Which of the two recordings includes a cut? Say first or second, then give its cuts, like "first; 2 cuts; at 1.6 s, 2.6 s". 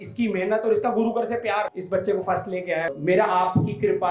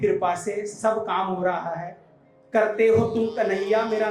first; 2 cuts; at 1.7 s, 2.9 s